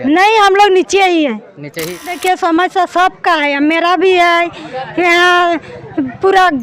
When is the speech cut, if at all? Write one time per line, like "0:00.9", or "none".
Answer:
0:02.1